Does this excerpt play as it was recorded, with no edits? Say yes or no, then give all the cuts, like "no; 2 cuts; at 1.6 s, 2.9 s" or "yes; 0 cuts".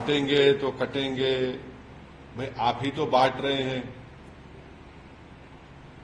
yes; 0 cuts